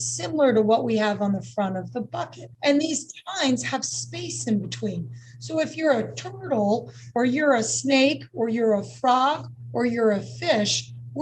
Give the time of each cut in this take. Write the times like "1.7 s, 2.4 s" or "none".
2.6 s